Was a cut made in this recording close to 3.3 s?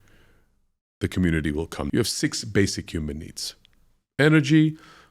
no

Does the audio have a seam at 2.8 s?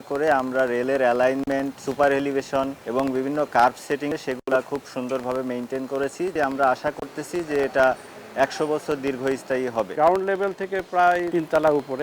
yes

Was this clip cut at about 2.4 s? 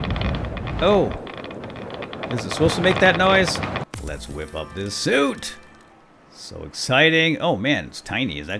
no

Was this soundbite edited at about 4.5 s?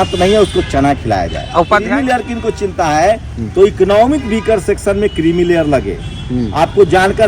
no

